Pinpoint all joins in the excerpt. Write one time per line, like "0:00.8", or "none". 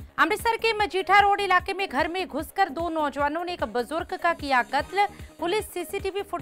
none